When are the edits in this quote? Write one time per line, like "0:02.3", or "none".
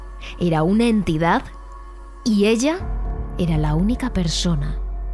none